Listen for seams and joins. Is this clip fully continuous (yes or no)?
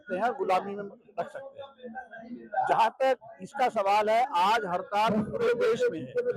yes